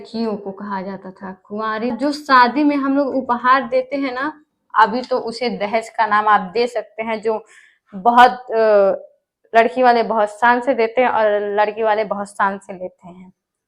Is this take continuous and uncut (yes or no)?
no